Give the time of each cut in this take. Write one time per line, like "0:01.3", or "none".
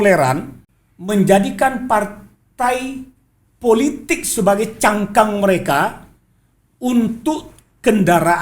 none